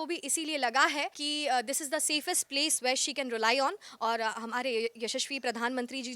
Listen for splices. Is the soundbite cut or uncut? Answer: cut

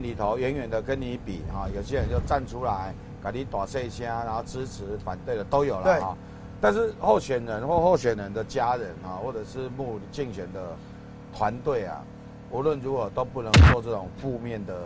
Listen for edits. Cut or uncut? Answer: uncut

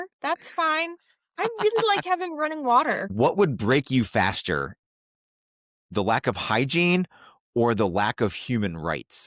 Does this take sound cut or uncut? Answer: cut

